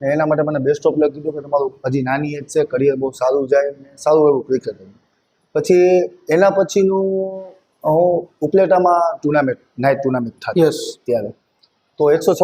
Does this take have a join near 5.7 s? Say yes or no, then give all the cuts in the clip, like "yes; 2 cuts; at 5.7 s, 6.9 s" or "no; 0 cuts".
no; 0 cuts